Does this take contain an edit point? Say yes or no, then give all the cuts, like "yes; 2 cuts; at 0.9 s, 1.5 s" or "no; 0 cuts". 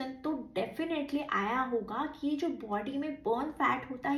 no; 0 cuts